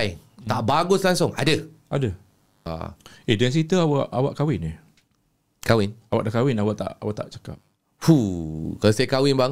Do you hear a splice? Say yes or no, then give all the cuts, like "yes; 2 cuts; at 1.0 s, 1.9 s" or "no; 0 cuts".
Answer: yes; 1 cut; at 2.6 s